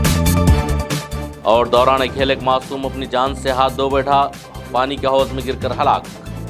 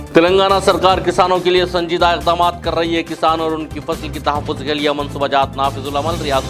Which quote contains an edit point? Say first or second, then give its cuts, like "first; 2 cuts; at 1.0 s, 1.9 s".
first; 1 cut; at 1.2 s